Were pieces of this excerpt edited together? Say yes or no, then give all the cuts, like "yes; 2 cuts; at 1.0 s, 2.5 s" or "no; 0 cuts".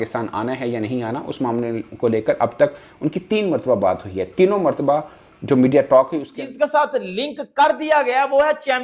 yes; 1 cut; at 6.3 s